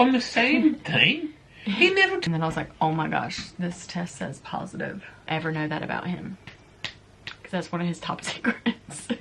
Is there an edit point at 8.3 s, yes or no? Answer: no